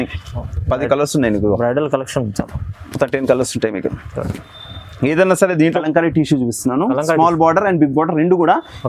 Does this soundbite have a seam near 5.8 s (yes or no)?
yes